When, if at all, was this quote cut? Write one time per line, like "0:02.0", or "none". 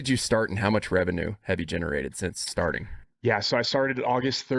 none